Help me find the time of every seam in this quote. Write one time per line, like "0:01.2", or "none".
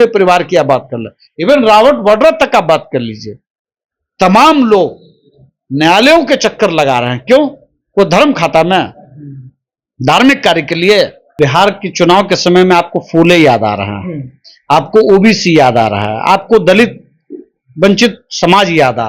0:11.3